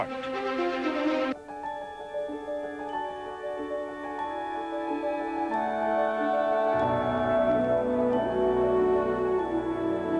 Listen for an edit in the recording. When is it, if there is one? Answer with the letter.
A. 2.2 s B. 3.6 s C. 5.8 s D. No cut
C